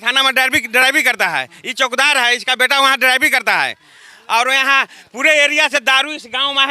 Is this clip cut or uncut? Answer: uncut